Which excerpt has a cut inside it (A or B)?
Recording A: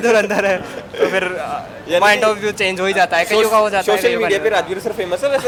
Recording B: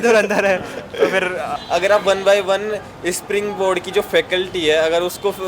B